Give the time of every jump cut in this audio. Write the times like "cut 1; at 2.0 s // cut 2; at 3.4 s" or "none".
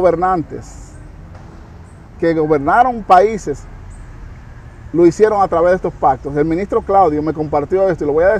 none